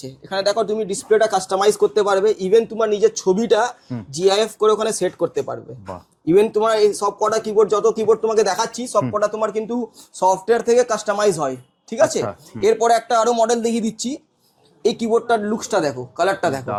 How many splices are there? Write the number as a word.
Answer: zero